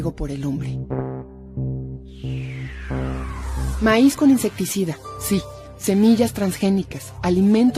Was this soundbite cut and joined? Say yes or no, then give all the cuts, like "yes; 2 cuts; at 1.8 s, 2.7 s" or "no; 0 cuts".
yes; 1 cut; at 1.1 s